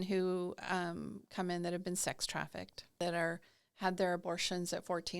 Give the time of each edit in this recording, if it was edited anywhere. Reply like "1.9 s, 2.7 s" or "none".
3.0 s